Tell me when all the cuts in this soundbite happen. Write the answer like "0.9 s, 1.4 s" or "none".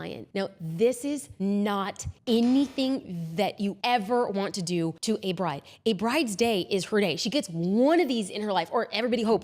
1.3 s, 2.0 s, 3.8 s, 5.0 s